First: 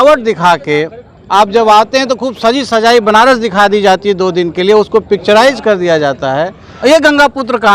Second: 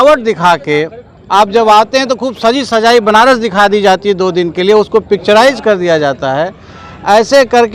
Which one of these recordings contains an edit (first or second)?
first